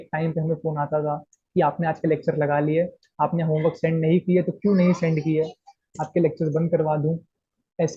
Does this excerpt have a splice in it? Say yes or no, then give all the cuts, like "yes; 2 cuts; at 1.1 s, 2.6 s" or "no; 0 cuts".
no; 0 cuts